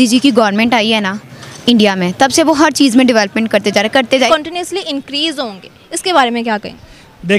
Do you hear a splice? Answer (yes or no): yes